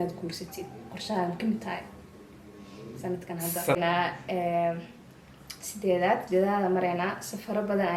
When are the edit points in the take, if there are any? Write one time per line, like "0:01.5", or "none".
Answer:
0:03.8

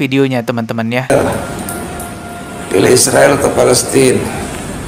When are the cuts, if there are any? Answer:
0:01.1

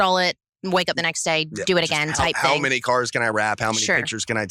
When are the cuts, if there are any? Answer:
none

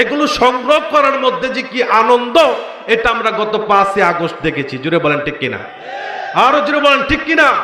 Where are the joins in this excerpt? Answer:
none

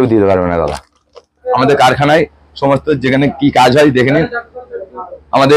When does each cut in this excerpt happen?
0:01.4

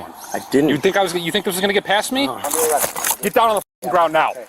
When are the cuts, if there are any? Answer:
0:02.4

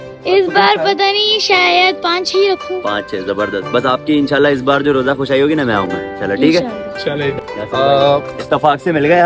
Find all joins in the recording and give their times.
0:07.4

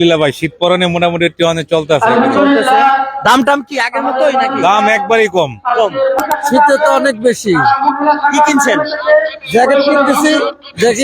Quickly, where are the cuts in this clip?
0:06.2

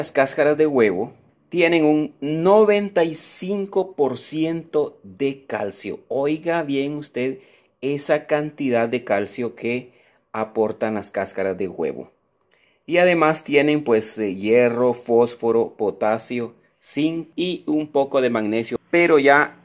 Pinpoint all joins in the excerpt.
none

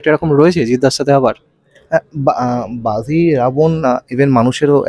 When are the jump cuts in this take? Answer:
none

